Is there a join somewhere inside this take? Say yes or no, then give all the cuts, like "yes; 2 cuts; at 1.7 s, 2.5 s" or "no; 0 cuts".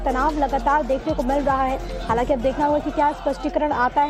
no; 0 cuts